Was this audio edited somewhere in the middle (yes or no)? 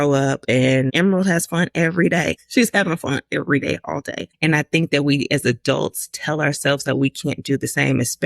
yes